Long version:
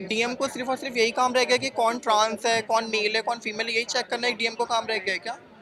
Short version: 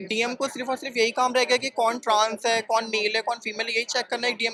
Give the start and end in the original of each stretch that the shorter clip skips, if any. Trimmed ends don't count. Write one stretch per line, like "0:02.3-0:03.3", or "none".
none